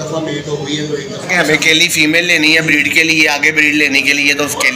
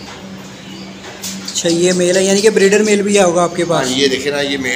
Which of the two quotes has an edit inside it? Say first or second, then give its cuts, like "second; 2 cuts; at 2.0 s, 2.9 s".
first; 1 cut; at 1.3 s